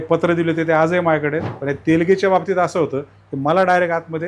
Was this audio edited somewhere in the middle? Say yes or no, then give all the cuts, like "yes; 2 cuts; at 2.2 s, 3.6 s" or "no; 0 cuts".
yes; 1 cut; at 1.5 s